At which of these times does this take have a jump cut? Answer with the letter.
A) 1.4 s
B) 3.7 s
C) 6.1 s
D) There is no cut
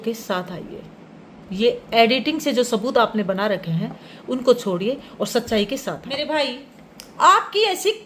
C